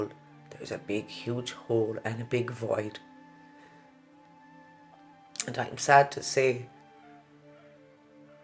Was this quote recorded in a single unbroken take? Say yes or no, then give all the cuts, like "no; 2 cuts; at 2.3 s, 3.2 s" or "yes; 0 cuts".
no; 2 cuts; at 3.0 s, 5.4 s